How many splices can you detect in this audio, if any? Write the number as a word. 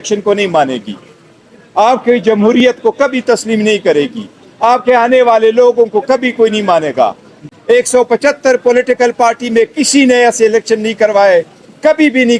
one